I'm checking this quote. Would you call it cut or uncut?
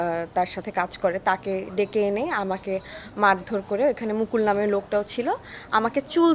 uncut